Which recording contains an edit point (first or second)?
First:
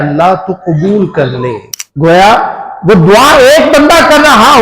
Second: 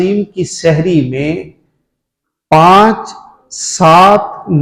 first